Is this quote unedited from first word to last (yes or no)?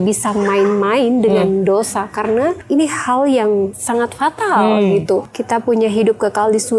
no